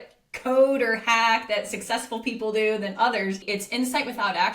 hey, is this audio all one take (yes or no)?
no